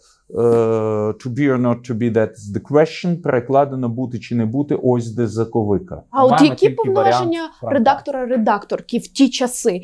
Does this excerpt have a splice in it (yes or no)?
yes